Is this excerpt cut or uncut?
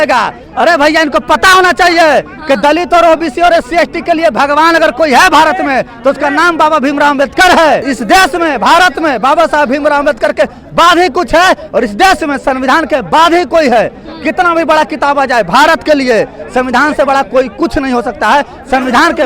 uncut